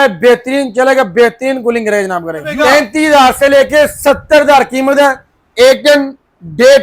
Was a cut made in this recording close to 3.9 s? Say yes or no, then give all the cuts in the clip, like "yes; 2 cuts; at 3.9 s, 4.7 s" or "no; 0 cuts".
no; 1 cut; at 2.5 s